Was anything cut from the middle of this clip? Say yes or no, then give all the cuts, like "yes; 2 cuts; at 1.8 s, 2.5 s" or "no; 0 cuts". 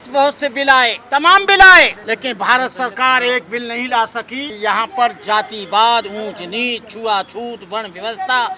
yes; 3 cuts; at 1.0 s, 2.0 s, 4.4 s